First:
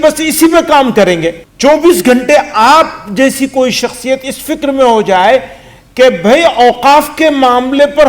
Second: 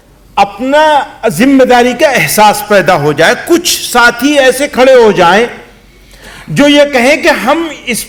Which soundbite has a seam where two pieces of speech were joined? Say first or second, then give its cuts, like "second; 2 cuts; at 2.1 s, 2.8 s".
first; 1 cut; at 1.4 s